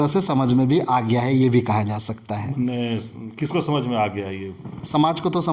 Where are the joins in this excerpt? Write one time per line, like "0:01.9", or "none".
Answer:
none